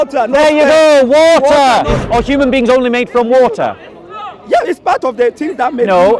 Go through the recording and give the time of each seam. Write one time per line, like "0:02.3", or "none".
0:02.0